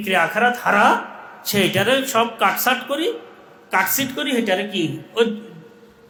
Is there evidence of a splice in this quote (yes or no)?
no